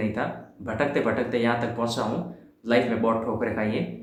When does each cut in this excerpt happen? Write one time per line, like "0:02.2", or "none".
none